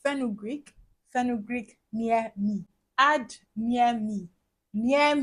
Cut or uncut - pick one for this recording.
uncut